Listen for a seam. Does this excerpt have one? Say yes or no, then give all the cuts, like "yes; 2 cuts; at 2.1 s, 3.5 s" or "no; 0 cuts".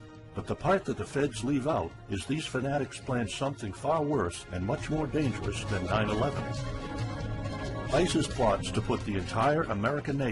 yes; 1 cut; at 8.3 s